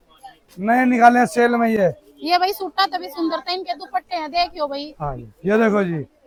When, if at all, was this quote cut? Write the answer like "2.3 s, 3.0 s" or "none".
none